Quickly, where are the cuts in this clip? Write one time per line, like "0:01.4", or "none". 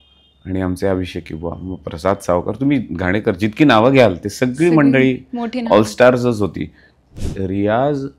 0:07.1